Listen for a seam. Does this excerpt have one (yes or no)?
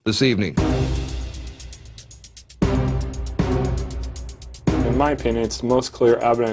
no